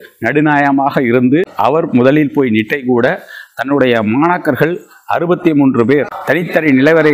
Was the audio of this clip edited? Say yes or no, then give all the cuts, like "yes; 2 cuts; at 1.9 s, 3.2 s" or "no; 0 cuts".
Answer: yes; 2 cuts; at 1.5 s, 6.1 s